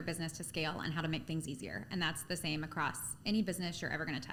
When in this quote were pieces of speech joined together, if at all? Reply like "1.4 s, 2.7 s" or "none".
none